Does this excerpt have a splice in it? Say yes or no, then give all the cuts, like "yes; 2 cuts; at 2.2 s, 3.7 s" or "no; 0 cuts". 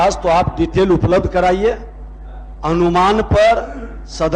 no; 0 cuts